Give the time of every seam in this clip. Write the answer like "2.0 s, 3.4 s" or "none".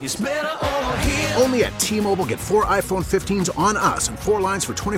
none